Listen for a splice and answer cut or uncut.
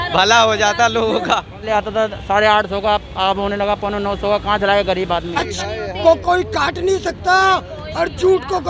cut